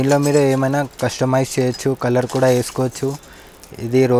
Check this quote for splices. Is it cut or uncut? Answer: uncut